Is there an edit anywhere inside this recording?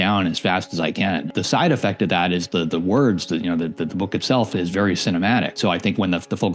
yes; 2 cuts; at 1.3 s, 5.5 s

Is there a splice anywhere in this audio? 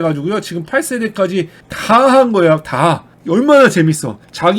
no; 0 cuts

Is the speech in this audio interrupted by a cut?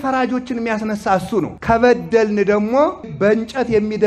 yes; 2 cuts; at 1.5 s, 3.1 s

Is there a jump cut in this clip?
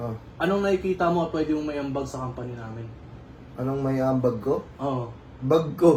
no; 0 cuts

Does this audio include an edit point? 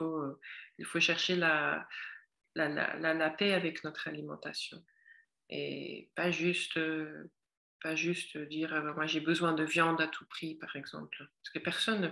no; 0 cuts

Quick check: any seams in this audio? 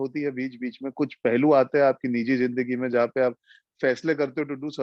no; 0 cuts

